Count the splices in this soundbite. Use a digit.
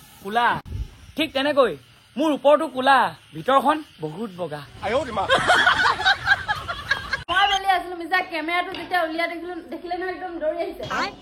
1